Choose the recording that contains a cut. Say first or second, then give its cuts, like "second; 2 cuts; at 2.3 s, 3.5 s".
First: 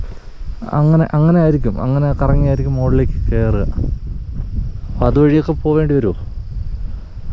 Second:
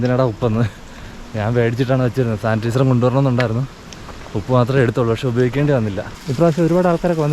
second; 1 cut; at 6.1 s